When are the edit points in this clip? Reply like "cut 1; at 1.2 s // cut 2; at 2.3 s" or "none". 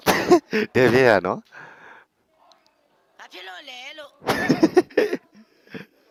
none